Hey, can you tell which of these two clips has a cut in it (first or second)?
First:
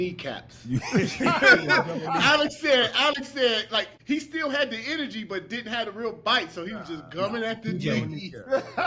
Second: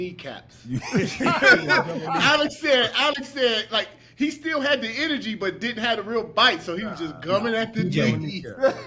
first